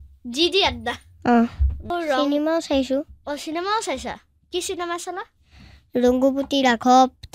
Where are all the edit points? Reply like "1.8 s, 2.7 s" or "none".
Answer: 1.9 s